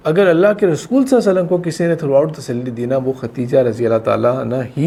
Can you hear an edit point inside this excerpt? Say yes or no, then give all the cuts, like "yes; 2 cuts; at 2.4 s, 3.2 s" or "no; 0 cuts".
no; 0 cuts